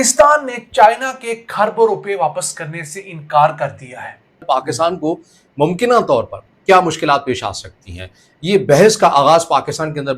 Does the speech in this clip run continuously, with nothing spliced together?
no; 1 cut; at 4.7 s

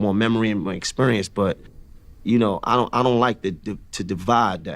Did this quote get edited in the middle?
yes; 1 cut; at 2.6 s

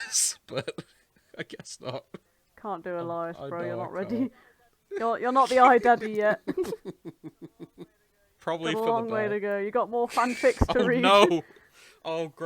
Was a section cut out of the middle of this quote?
yes; 1 cut; at 2.4 s

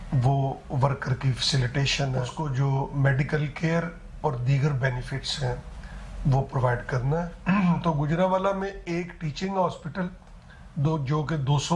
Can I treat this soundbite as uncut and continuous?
no; 2 cuts; at 2.3 s, 7.3 s

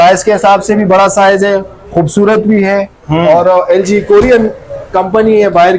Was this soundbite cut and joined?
no; 0 cuts

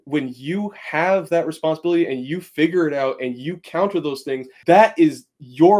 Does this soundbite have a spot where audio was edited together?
yes; 1 cut; at 4.5 s

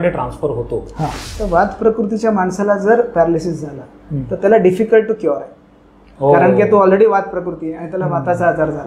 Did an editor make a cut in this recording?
yes; 1 cut; at 1.2 s

